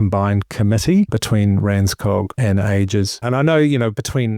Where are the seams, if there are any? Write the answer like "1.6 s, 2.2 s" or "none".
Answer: 1.2 s, 2.3 s, 3.2 s

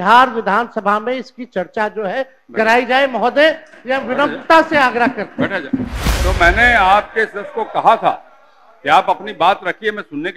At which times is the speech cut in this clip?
6.0 s

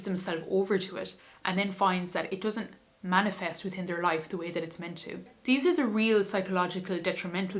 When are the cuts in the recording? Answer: 5.3 s

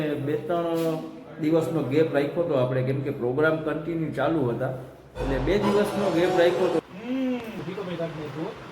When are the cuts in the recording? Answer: 6.8 s

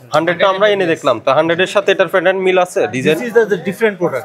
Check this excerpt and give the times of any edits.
none

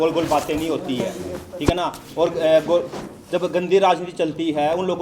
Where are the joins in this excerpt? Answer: none

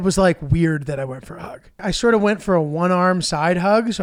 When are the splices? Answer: 1.8 s

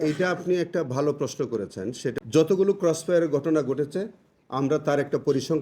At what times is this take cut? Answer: 2.2 s

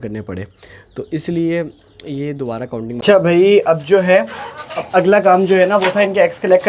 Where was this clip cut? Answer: 3.0 s

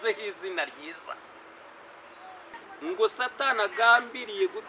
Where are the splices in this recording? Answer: 2.6 s

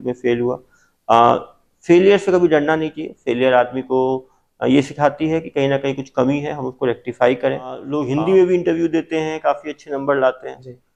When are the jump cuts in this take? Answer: 7.9 s

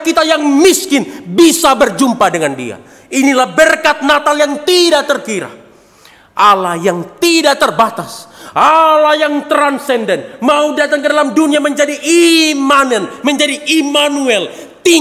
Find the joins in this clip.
none

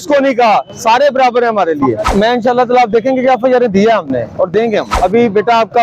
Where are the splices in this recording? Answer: 2.1 s, 4.9 s

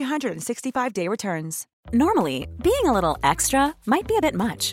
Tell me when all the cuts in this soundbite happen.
1.8 s

